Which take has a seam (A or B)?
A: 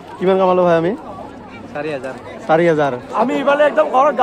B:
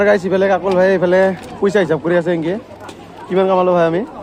A